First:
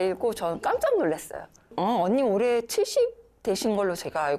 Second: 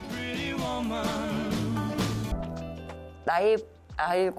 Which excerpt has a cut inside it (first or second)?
second